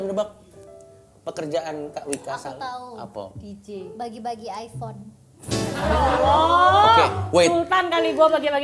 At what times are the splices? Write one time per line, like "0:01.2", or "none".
none